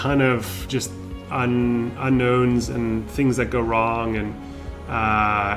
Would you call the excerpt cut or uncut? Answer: uncut